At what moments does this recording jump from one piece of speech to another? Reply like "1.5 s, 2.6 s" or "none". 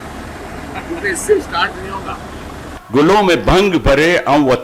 2.8 s